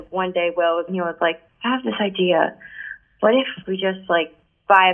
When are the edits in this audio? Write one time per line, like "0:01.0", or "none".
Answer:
0:00.9
0:03.5

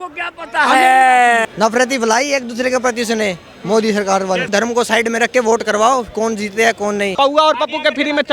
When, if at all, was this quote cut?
0:01.5
0:04.5
0:07.1

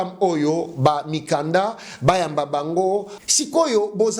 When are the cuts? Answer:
0:03.1

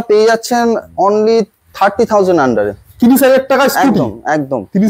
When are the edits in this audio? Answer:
none

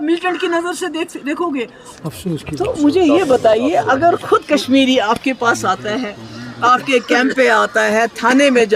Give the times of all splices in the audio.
0:01.9

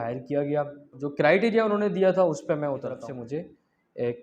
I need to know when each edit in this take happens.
0:01.0
0:03.0

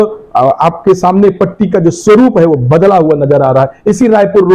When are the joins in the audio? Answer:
none

